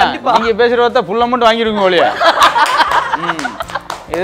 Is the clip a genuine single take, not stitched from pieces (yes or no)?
yes